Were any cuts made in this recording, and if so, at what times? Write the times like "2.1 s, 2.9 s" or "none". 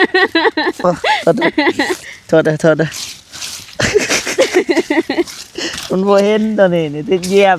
none